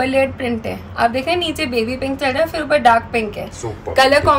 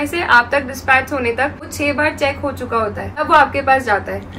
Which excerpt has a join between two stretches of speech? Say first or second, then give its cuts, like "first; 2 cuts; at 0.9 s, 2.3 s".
second; 2 cuts; at 1.7 s, 3.2 s